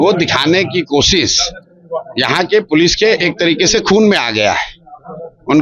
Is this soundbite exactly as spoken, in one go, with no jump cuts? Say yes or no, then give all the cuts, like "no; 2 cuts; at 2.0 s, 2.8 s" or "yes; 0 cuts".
yes; 0 cuts